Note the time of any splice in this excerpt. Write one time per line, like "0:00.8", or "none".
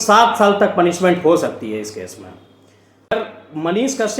0:03.1